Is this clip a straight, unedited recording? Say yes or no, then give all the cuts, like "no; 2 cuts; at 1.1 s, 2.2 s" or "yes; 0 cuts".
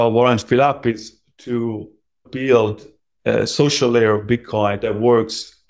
no; 1 cut; at 2.3 s